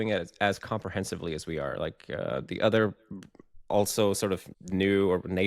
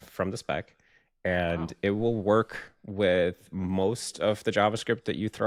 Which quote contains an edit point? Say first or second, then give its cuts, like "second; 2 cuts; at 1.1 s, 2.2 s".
first; 1 cut; at 4.5 s